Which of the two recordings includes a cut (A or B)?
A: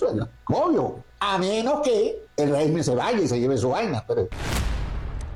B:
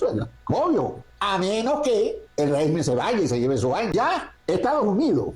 B